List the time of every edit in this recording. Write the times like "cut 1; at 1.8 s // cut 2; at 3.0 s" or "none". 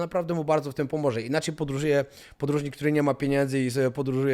none

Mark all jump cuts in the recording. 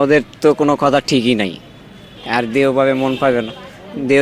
cut 1; at 1.7 s

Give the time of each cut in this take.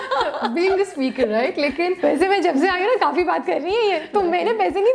none

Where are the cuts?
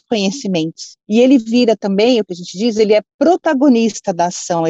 cut 1; at 0.9 s // cut 2; at 3.1 s

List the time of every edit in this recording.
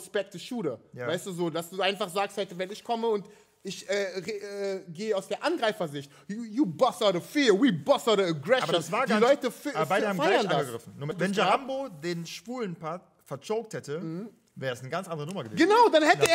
cut 1; at 11.1 s

